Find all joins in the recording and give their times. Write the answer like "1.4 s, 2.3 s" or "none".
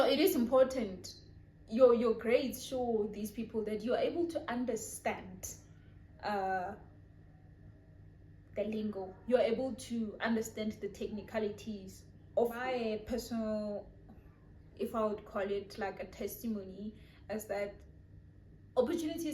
12.7 s